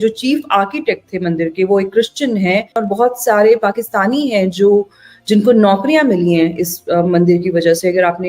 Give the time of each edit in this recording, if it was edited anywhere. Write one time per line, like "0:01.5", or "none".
0:02.8